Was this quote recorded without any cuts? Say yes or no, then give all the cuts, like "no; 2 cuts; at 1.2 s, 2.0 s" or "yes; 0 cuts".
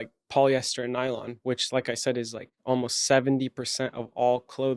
yes; 0 cuts